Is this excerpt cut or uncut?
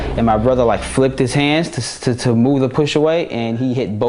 uncut